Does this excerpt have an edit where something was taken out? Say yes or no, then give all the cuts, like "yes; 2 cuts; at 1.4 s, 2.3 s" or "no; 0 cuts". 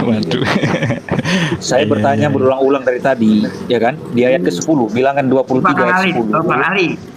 no; 0 cuts